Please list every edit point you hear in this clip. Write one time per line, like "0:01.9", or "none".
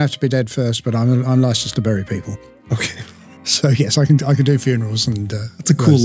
none